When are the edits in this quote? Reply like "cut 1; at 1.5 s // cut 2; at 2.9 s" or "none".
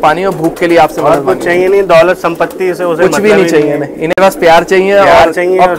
none